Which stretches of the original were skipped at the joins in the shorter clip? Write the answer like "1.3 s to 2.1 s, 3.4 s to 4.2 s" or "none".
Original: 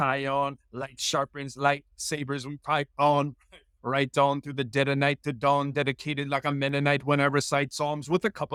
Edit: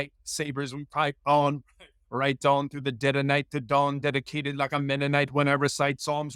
none